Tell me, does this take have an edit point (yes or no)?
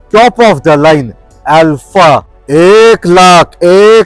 yes